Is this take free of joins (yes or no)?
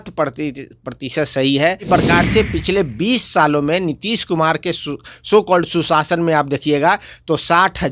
no